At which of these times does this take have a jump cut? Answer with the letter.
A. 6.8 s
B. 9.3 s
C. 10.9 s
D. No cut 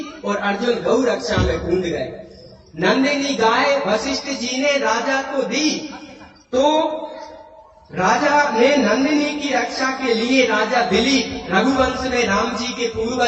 C